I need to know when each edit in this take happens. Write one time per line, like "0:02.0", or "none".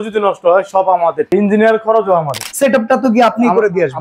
0:01.3
0:02.4